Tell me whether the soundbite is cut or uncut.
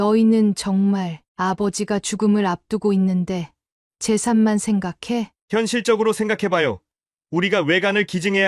uncut